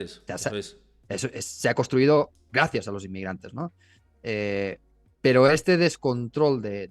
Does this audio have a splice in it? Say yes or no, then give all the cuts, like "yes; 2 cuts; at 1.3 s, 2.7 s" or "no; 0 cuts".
no; 0 cuts